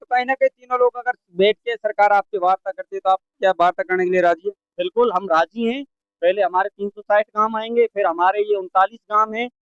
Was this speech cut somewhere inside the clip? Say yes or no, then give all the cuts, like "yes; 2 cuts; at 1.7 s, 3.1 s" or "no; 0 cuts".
no; 0 cuts